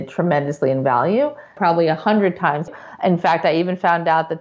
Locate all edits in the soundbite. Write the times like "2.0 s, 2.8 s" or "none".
1.5 s, 2.7 s